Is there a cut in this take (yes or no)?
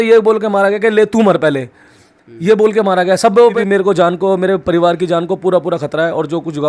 yes